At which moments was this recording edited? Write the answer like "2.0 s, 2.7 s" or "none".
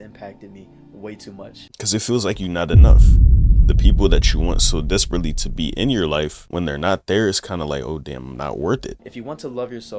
1.6 s, 6.4 s, 8.9 s